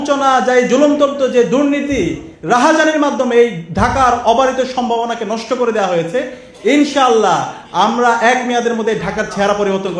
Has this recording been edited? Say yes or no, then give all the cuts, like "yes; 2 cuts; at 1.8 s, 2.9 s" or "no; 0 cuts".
no; 0 cuts